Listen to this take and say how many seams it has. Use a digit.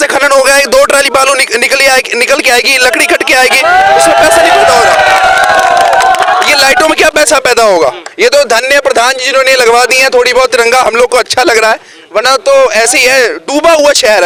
0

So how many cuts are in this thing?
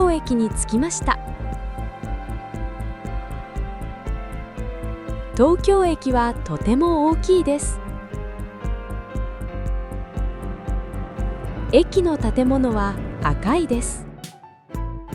5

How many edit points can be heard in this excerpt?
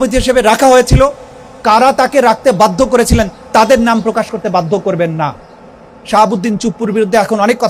0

